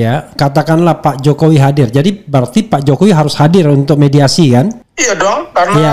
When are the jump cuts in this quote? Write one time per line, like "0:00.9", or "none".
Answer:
0:04.9